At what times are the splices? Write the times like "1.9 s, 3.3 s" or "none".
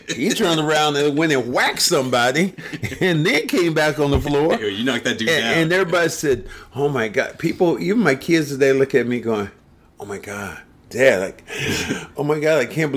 none